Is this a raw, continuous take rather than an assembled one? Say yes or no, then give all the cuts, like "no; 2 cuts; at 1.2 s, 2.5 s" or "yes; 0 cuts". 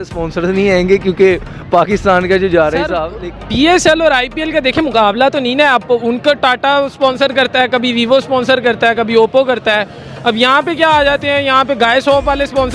no; 1 cut; at 3.0 s